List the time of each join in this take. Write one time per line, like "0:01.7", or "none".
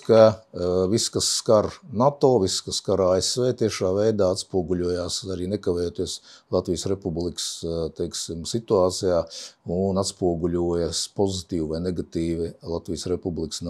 none